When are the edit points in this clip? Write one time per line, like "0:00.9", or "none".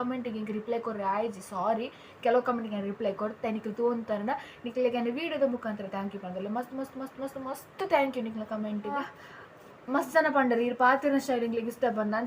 0:08.9